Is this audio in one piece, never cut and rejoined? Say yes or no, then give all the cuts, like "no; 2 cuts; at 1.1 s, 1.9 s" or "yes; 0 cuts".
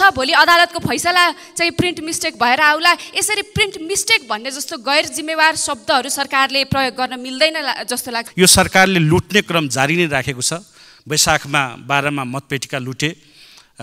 no; 1 cut; at 8.2 s